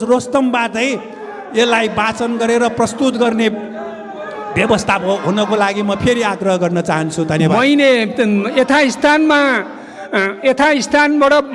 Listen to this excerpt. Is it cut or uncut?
uncut